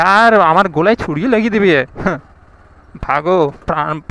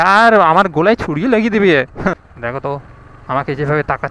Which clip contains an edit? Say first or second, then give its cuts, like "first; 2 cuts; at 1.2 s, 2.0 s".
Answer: second; 1 cut; at 2.3 s